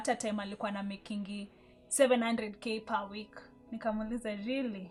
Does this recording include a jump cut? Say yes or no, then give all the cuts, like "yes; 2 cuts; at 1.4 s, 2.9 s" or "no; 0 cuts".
no; 0 cuts